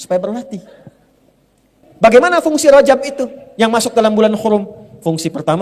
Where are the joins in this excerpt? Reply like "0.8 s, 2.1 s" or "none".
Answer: 1.7 s